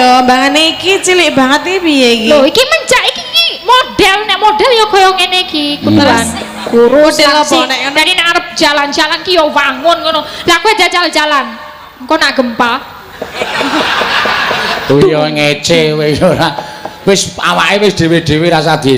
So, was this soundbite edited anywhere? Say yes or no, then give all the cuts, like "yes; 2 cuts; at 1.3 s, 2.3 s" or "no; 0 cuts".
no; 0 cuts